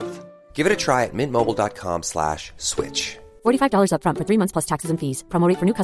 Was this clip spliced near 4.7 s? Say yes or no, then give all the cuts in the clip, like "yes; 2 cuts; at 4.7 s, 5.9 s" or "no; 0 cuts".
no; 0 cuts